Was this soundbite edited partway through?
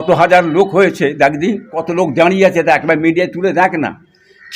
yes; 1 cut; at 1.8 s

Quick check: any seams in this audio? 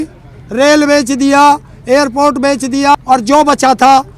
yes; 1 cut; at 2.9 s

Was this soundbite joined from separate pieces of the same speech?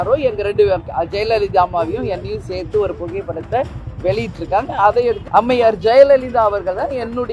yes; 1 cut; at 5.2 s

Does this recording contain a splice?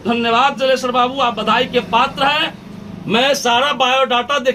no; 0 cuts

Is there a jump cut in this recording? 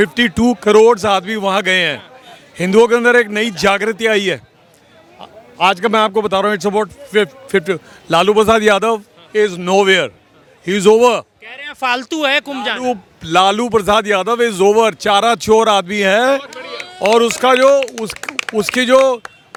no; 0 cuts

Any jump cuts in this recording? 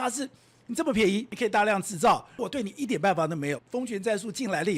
yes; 3 cuts; at 1.3 s, 2.4 s, 3.6 s

